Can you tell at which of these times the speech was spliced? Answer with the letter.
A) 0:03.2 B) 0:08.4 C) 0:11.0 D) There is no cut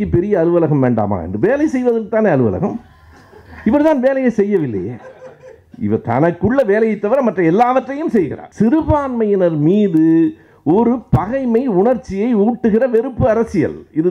B